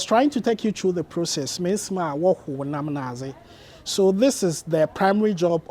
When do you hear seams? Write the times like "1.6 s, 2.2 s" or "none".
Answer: none

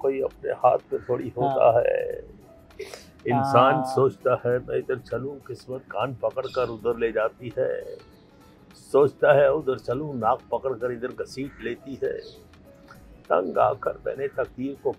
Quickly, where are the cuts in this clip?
none

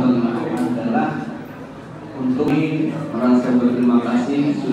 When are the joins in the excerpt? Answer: 2.5 s

